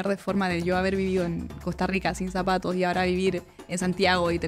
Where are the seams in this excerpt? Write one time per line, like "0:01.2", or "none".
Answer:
none

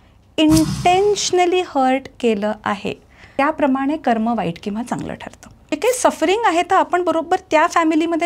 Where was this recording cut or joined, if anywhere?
0:03.2
0:05.8

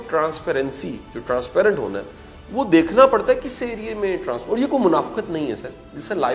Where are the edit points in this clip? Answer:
none

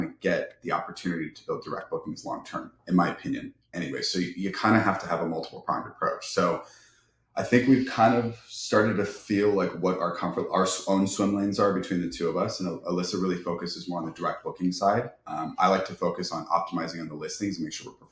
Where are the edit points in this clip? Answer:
none

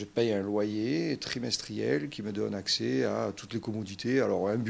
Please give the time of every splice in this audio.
none

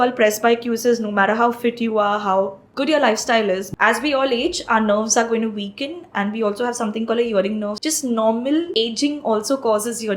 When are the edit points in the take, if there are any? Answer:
0:02.6
0:03.7
0:07.7
0:08.7

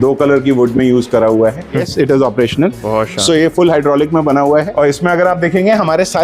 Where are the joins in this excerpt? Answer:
0:01.9
0:04.7

